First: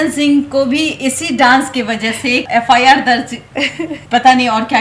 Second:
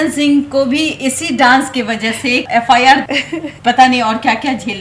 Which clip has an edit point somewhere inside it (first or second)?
second